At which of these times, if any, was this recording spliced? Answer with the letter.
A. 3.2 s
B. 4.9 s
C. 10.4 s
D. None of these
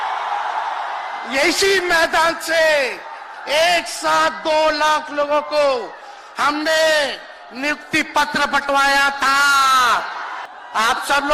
C